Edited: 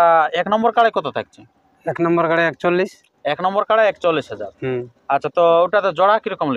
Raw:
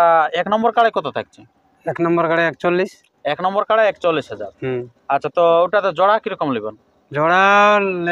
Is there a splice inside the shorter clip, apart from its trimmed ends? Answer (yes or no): no